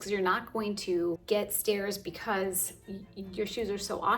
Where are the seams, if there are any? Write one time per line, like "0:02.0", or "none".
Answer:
0:01.2